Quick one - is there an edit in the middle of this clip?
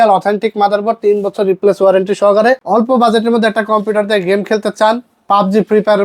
yes; 1 cut; at 2.6 s

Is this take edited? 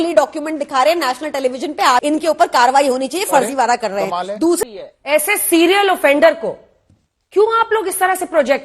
yes; 2 cuts; at 2.0 s, 4.6 s

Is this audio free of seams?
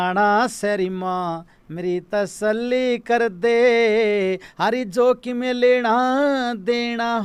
yes; 0 cuts

